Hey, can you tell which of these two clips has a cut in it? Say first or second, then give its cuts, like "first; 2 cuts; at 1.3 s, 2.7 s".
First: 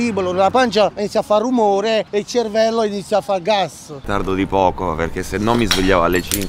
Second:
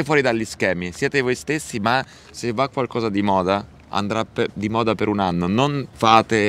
first; 3 cuts; at 1.0 s, 2.1 s, 4.0 s